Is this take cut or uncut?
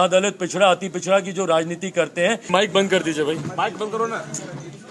cut